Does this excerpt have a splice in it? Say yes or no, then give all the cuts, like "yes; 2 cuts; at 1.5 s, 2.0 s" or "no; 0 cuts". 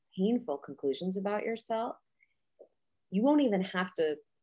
no; 0 cuts